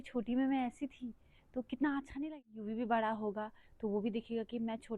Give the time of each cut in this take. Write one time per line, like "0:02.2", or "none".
0:02.3